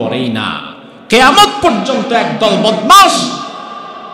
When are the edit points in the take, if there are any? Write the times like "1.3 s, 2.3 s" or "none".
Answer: none